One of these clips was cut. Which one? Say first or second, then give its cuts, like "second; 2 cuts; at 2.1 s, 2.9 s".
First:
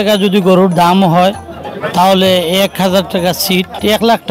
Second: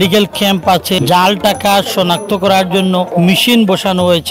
second; 2 cuts; at 1.0 s, 3.1 s